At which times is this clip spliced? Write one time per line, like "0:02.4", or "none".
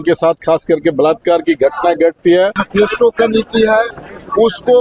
0:02.6